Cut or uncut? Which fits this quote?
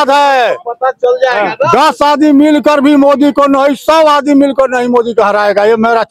uncut